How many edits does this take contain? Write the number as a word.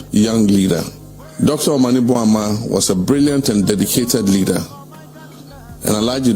zero